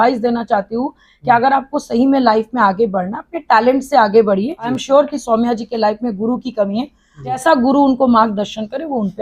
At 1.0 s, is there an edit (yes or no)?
no